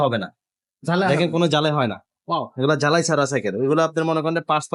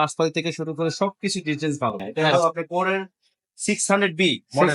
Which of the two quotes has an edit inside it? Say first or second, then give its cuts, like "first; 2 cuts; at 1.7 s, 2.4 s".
second; 1 cut; at 2.1 s